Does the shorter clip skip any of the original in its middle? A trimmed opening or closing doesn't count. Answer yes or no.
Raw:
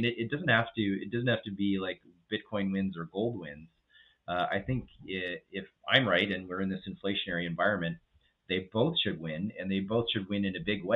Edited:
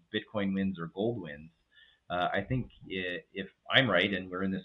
no